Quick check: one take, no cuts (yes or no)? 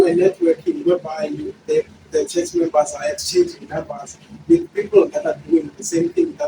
yes